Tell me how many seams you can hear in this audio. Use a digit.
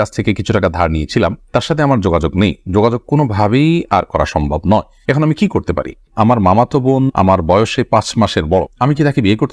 1